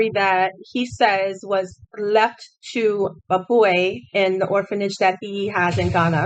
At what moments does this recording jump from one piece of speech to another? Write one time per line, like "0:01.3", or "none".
none